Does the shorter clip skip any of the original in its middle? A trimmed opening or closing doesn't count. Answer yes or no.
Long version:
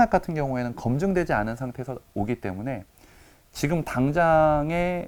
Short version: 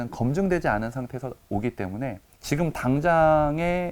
yes